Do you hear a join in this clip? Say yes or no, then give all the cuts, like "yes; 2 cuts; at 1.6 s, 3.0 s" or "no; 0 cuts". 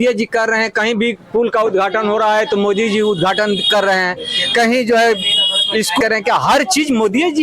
yes; 1 cut; at 6.0 s